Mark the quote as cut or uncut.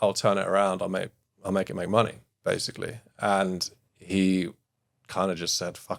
uncut